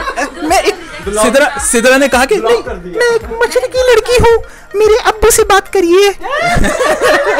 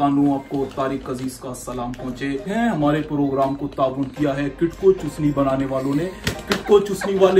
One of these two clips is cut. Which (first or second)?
second